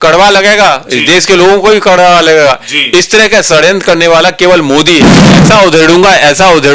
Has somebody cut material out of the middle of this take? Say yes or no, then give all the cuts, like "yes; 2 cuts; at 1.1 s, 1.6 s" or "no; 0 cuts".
yes; 1 cut; at 5.4 s